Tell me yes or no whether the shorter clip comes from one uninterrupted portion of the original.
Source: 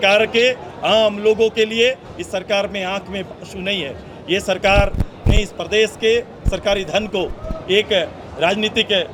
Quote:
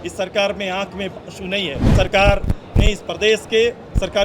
no